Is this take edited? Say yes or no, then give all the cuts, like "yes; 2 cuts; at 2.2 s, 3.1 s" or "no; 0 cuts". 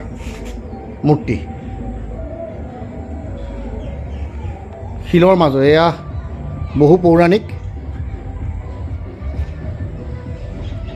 no; 0 cuts